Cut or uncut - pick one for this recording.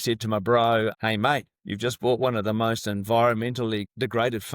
cut